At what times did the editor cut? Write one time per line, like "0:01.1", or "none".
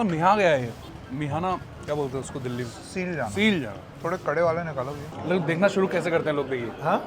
0:00.9
0:01.7
0:03.8
0:05.1